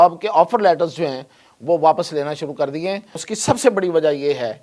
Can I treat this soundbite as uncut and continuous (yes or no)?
no